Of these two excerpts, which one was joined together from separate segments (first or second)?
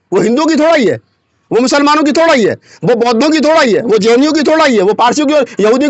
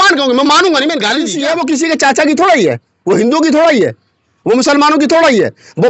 second